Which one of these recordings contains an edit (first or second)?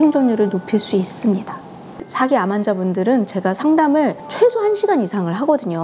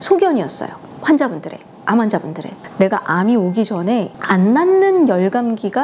first